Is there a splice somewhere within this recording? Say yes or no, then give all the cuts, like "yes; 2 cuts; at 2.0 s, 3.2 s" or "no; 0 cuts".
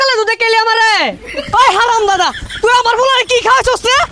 yes; 1 cut; at 1.2 s